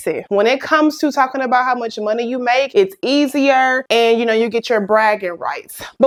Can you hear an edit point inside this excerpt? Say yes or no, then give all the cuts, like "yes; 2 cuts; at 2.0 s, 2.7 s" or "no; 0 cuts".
no; 0 cuts